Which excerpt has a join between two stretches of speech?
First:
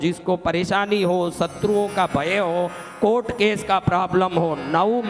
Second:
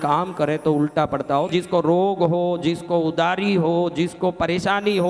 second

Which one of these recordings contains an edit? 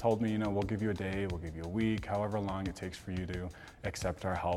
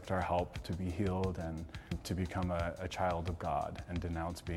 second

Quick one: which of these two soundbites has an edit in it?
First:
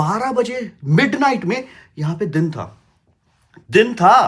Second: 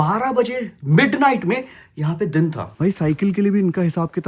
second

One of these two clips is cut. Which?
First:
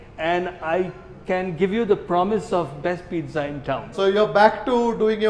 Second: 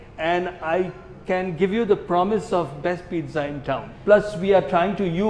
second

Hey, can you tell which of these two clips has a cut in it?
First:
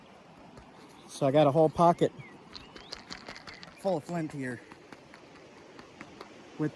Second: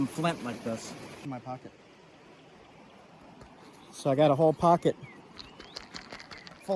second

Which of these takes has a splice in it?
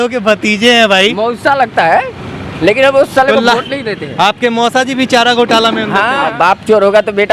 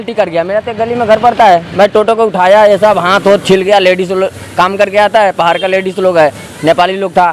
first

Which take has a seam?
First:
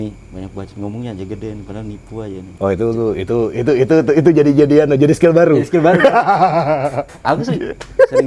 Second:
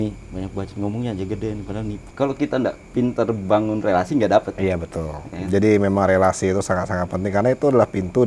second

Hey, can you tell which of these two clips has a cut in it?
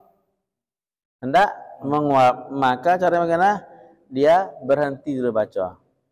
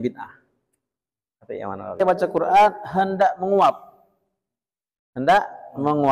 second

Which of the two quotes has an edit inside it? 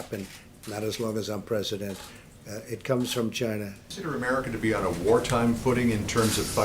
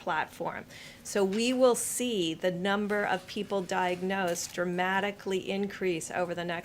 first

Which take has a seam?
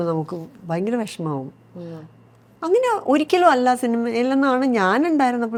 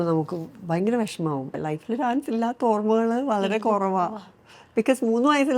second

